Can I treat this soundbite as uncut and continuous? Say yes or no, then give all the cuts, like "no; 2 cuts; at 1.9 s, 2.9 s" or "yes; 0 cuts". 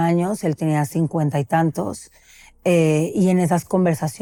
yes; 0 cuts